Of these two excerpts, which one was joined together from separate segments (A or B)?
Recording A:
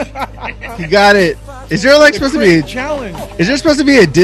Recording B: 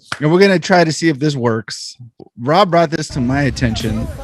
B